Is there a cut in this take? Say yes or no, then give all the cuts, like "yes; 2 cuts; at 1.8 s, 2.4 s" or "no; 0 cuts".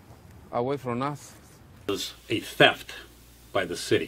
yes; 1 cut; at 1.9 s